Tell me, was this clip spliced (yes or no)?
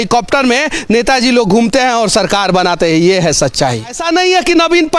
yes